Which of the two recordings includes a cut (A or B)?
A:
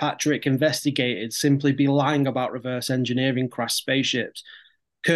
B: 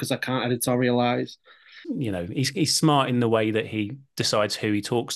B